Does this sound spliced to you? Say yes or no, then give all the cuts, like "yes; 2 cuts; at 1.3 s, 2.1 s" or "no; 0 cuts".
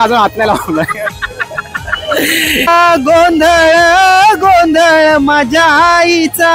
yes; 1 cut; at 2.7 s